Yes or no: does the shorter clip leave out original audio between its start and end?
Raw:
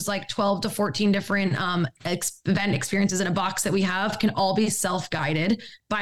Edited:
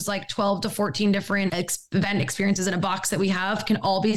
yes